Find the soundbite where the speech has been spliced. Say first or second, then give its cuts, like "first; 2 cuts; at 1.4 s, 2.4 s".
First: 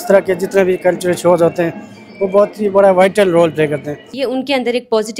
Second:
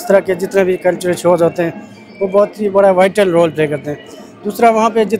first; 1 cut; at 4.1 s